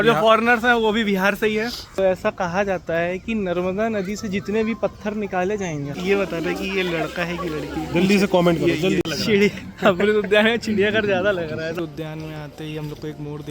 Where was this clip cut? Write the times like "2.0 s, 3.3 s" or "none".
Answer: 2.0 s, 6.0 s, 9.1 s, 11.7 s

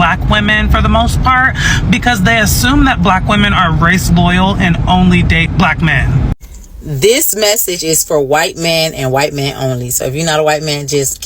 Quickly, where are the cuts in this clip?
6.3 s

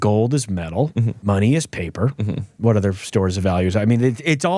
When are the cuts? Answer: 1.1 s

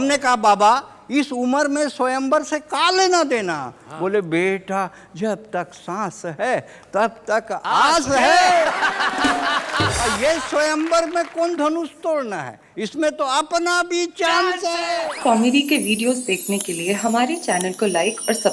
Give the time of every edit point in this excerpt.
10.1 s, 14.9 s

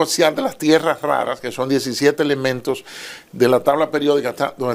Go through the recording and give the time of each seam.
none

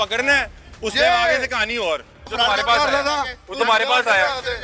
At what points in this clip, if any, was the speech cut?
2.2 s

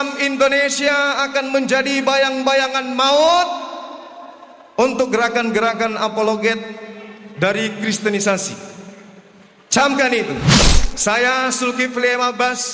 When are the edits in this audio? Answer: none

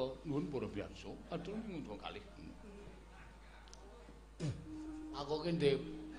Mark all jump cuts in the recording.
5.1 s

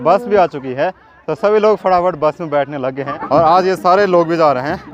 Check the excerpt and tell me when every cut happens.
3.1 s

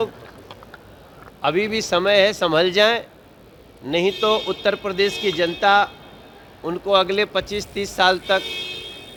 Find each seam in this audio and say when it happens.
none

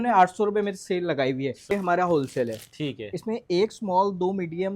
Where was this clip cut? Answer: 1.7 s

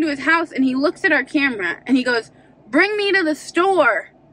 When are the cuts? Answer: none

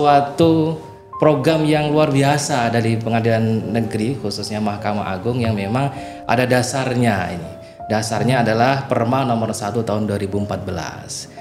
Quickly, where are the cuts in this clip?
none

